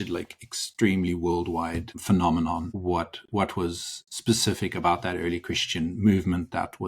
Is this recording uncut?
no; 2 cuts; at 1.9 s, 2.7 s

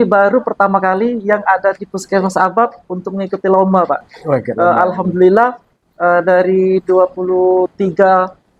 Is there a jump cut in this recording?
no; 0 cuts

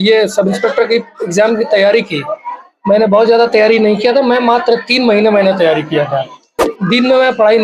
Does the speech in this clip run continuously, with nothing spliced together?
no; 1 cut; at 6.7 s

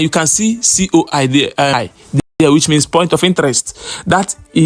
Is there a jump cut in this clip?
yes; 1 cut; at 1.9 s

